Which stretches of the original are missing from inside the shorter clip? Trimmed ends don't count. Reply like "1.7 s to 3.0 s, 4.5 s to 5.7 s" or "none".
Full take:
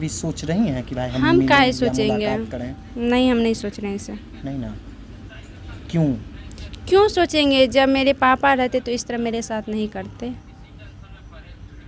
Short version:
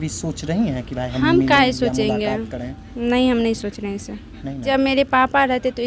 4.6 s to 7.7 s